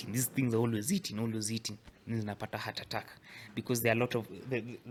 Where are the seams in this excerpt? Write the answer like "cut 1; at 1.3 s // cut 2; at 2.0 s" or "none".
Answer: none